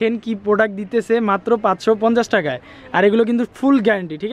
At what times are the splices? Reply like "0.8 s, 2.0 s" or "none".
none